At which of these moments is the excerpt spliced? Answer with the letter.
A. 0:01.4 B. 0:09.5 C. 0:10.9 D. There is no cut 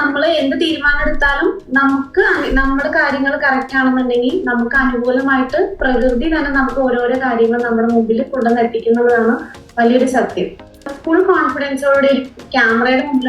C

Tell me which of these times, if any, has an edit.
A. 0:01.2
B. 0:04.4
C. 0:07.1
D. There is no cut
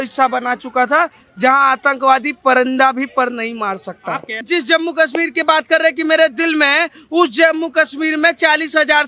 B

